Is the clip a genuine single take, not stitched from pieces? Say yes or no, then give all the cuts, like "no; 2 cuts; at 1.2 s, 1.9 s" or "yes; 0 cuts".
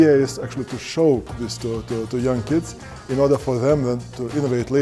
yes; 0 cuts